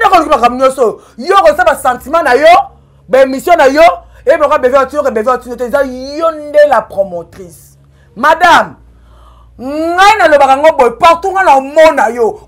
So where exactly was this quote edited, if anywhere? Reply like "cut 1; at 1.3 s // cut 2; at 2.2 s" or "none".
none